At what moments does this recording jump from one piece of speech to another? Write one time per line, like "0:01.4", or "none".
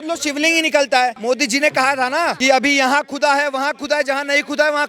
none